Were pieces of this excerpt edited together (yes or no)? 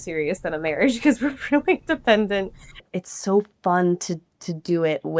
yes